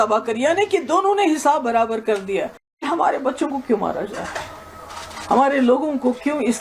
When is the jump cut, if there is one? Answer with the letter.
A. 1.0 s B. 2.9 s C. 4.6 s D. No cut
B